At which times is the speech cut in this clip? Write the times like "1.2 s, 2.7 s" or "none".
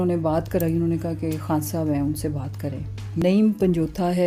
3.2 s